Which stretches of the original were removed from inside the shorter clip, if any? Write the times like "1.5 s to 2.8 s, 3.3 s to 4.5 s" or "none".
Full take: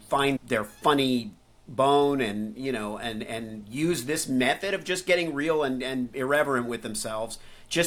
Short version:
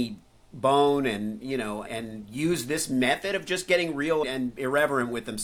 3.0 s to 3.2 s, 5.6 s to 5.8 s